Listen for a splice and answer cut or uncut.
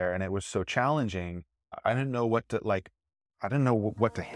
cut